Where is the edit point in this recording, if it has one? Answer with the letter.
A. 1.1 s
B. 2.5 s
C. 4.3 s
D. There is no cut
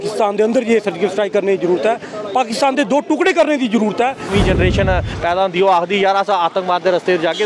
C